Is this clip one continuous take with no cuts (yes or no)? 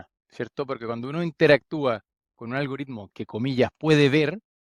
yes